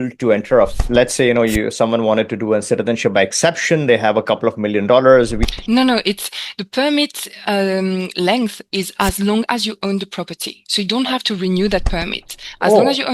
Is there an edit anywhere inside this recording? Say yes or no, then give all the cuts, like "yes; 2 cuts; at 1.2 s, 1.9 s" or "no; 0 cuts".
yes; 2 cuts; at 0.8 s, 5.4 s